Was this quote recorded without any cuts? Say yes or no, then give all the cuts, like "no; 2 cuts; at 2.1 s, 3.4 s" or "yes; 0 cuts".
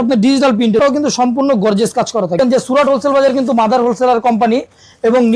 no; 2 cuts; at 0.8 s, 2.4 s